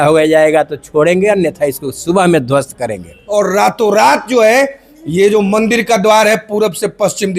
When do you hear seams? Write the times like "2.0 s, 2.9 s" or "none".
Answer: 3.2 s